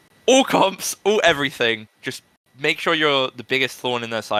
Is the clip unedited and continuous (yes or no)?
yes